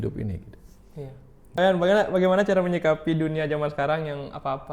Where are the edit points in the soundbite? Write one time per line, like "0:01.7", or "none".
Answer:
0:01.6